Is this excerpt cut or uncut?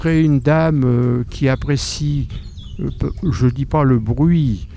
uncut